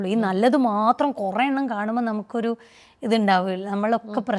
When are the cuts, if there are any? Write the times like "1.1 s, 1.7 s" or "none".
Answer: none